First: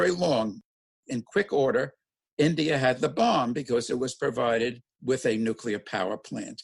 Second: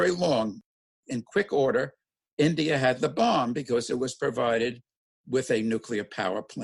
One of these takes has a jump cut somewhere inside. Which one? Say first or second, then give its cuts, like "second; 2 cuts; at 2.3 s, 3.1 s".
first; 1 cut; at 4.9 s